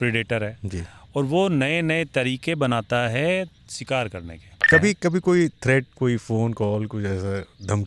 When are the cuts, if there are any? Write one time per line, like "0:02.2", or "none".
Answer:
0:04.7